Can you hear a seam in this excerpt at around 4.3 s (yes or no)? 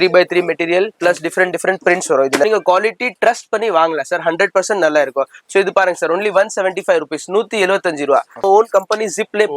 no